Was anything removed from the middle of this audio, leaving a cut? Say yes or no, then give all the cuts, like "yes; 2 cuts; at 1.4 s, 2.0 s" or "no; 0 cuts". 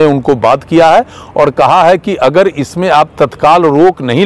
no; 0 cuts